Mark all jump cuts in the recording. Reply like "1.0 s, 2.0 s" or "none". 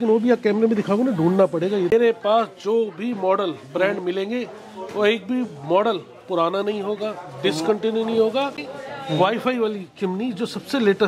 1.9 s, 8.6 s